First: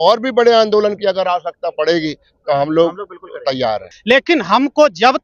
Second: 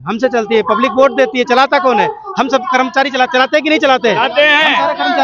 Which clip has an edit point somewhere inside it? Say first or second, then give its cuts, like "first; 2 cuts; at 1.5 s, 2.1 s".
first; 1 cut; at 3.9 s